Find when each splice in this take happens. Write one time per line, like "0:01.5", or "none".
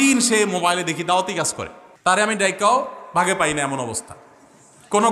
0:02.2